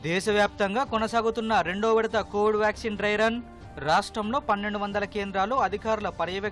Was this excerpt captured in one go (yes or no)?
yes